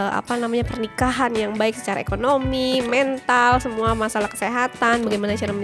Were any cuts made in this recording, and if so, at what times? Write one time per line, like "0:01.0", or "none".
none